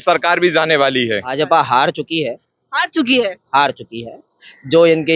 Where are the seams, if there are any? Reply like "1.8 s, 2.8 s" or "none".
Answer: 1.3 s